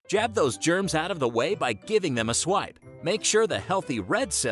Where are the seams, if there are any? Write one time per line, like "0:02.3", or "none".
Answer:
none

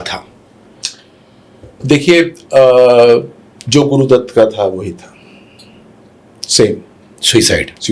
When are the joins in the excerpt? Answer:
none

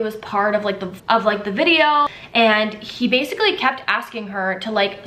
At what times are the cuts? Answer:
0:01.9

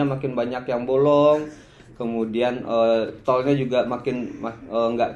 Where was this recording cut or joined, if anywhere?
none

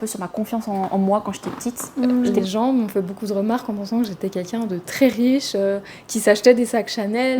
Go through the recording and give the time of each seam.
0:02.4

